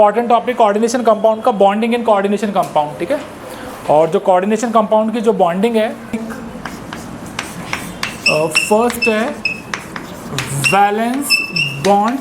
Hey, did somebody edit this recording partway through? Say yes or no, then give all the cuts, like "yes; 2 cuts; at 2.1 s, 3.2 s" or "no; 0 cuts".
yes; 1 cut; at 6.3 s